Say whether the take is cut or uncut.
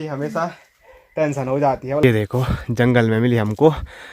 cut